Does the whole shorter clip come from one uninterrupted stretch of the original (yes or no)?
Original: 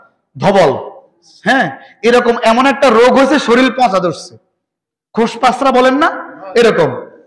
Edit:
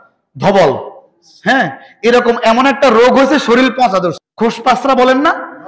no